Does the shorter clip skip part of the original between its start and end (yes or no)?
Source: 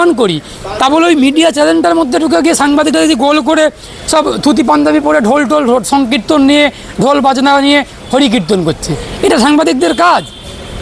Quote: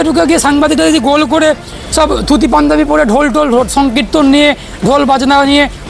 no